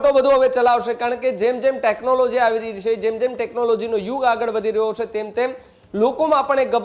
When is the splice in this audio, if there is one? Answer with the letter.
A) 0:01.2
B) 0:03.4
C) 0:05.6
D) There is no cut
D